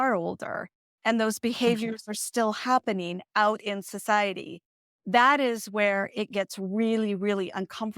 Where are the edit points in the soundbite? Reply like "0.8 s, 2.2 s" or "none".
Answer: none